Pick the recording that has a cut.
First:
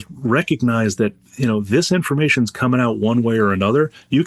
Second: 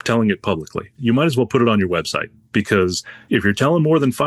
second; 1 cut; at 1.0 s

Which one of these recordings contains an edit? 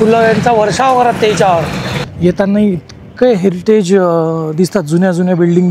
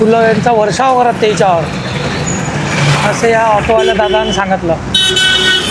first; 1 cut; at 2.0 s

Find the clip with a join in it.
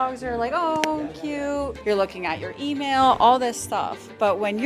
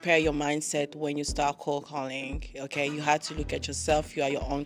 first; 1 cut; at 1.8 s

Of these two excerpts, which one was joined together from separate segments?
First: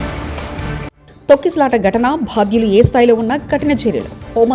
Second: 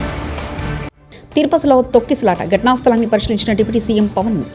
second; 1 cut; at 1.0 s

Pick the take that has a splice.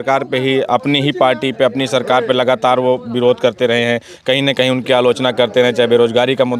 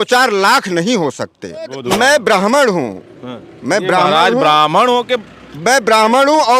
second; 1 cut; at 1.8 s

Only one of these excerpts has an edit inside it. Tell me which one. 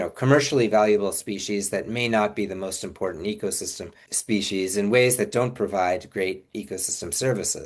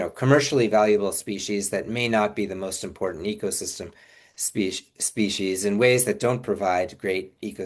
first; 1 cut; at 4.1 s

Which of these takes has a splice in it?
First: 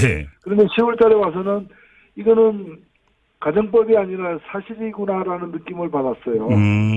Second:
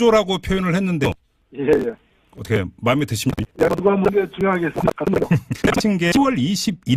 first; 1 cut; at 5.6 s

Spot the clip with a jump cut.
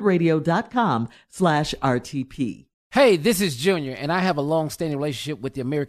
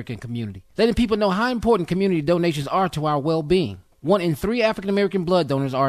first; 1 cut; at 2.7 s

